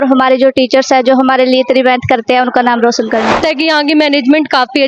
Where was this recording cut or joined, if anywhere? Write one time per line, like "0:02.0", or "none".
0:03.3